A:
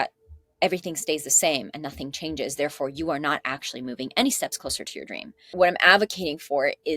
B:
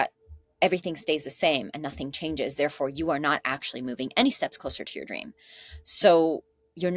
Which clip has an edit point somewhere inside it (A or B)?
A